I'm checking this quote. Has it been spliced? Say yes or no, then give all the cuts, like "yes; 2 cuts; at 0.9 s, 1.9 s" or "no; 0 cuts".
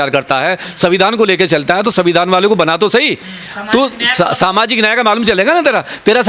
no; 0 cuts